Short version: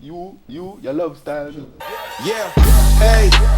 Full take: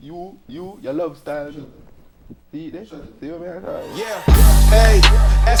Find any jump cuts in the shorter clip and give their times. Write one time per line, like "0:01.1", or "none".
0:02.1

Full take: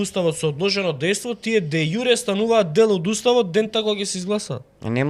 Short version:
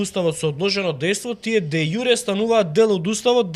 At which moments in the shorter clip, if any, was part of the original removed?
none

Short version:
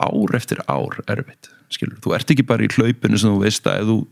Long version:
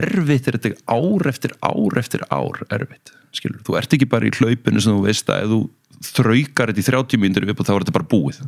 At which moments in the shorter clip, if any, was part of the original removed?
none

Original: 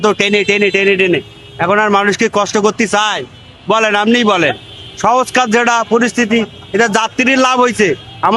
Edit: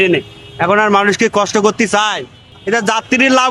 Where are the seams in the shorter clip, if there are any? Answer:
0:02.5

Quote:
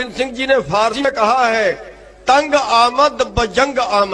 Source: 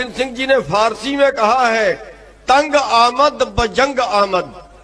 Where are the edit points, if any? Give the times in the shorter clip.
0:01.1

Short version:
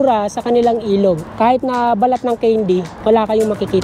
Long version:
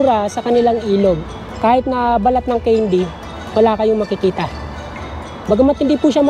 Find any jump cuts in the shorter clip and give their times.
0:01.3
0:02.9

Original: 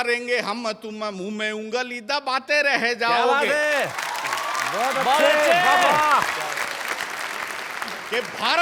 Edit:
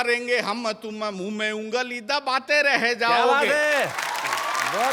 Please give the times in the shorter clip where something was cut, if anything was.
none

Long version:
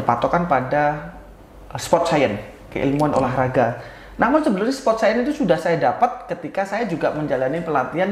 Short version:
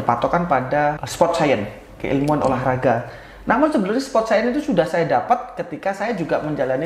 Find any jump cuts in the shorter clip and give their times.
0:01.0

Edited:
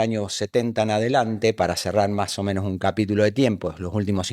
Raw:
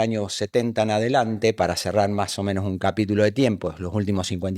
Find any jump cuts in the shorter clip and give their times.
none

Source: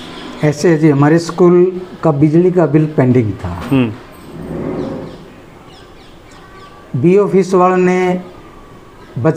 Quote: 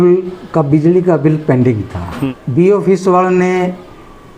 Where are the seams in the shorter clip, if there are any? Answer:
0:02.2

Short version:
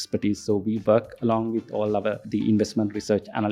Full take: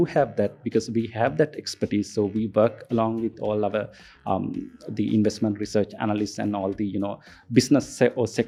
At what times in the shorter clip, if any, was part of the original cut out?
0:02.2

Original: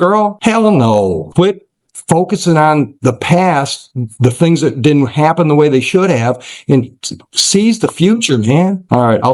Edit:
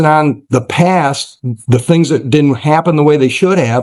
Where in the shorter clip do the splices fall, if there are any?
none

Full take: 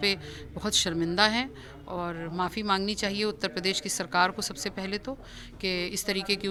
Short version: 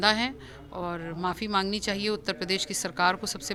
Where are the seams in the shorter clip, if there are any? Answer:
none

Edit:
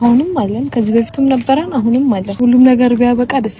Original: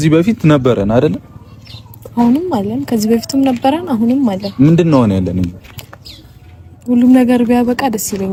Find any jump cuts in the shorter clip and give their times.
0:02.3

